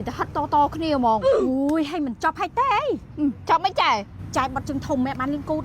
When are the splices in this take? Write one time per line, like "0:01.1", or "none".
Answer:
0:01.3
0:04.2